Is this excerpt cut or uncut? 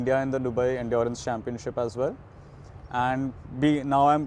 uncut